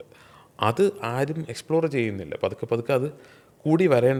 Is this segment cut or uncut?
uncut